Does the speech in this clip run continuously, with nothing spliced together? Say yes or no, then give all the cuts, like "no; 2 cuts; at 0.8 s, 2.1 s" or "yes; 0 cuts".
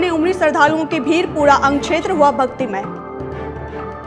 yes; 0 cuts